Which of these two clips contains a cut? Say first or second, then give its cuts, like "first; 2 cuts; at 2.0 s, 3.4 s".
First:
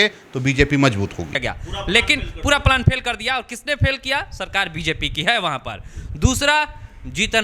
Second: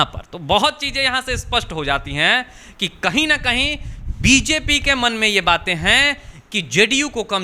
first; 1 cut; at 1.3 s